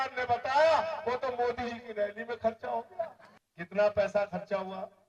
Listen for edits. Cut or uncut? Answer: cut